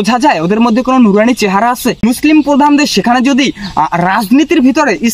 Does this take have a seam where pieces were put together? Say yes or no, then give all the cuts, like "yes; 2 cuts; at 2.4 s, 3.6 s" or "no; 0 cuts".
yes; 1 cut; at 2.0 s